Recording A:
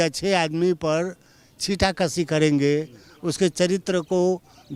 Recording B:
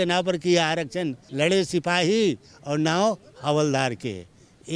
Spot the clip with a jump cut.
B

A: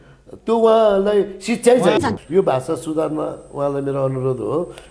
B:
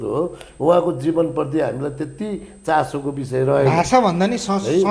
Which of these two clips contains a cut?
A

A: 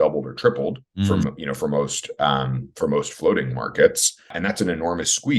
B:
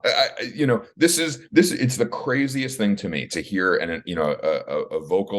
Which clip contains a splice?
A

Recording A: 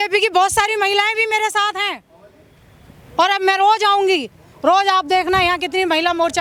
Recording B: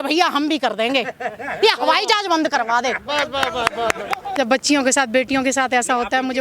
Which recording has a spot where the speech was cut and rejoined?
B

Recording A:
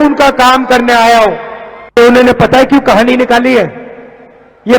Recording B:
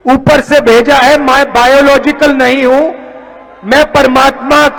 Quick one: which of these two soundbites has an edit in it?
A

